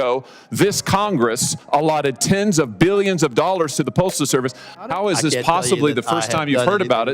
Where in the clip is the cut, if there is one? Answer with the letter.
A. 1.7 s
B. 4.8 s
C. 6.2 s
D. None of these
B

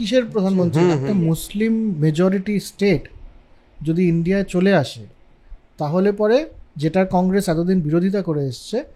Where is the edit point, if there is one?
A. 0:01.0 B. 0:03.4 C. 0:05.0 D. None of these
A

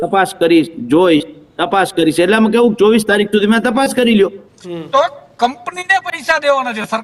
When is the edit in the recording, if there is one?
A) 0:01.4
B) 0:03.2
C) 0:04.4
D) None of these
C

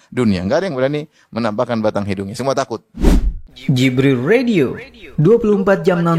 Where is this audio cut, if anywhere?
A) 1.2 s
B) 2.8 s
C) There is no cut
B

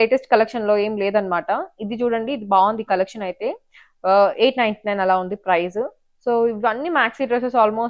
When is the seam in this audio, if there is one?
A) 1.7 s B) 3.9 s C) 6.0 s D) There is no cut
D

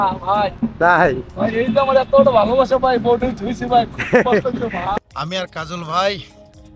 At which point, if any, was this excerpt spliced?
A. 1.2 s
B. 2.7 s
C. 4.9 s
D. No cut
C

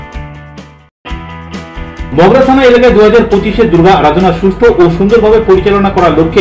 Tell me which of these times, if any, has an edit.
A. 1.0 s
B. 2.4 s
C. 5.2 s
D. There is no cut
A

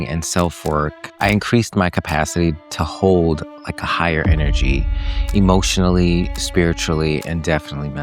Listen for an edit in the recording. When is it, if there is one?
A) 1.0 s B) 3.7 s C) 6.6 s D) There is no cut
A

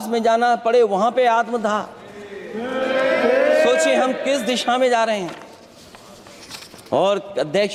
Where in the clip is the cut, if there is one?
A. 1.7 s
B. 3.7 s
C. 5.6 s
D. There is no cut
D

